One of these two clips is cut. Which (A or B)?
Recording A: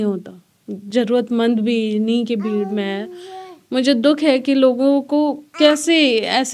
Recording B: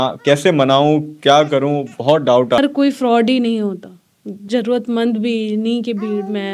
B